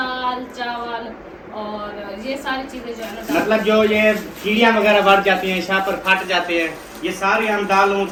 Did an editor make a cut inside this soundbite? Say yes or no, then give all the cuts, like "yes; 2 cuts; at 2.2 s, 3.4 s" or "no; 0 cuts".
no; 0 cuts